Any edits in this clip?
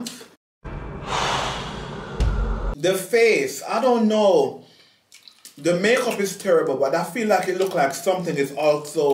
yes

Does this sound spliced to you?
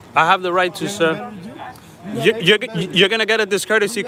no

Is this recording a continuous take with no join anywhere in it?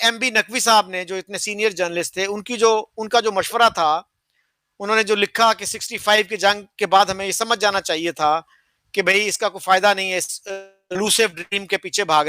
yes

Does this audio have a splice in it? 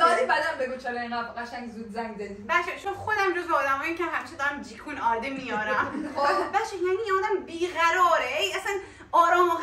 no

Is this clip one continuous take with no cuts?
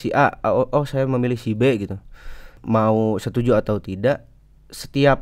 no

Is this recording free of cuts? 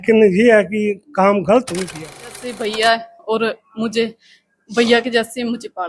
no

